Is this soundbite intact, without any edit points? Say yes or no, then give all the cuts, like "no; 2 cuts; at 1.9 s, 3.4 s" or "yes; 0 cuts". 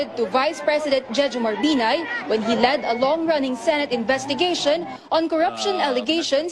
yes; 0 cuts